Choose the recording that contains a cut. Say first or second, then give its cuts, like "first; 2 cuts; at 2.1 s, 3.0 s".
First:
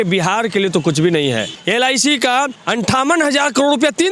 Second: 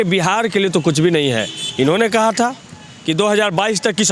first; 2 cuts; at 1.6 s, 2.6 s